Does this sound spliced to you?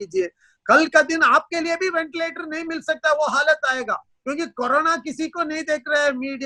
no; 0 cuts

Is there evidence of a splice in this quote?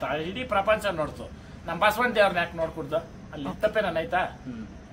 no; 0 cuts

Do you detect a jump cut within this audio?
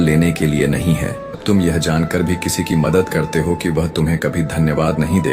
yes; 1 cut; at 1.4 s

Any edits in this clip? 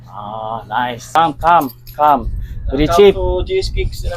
yes; 1 cut; at 1.2 s

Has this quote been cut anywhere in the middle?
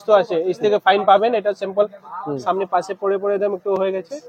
no; 0 cuts

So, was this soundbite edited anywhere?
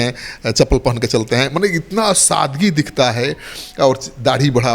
no; 0 cuts

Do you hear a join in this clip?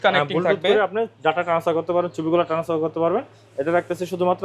no; 0 cuts

